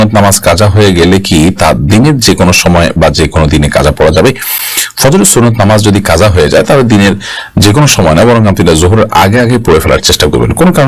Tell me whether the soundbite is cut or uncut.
uncut